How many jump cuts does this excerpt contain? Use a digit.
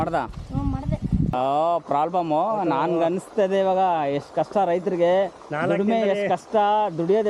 1